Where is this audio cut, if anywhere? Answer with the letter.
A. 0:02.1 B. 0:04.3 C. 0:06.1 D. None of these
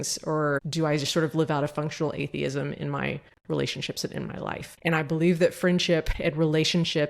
C